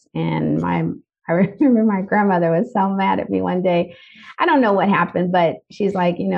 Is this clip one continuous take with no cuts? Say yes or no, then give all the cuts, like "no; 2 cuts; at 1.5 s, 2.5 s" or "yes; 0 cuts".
yes; 0 cuts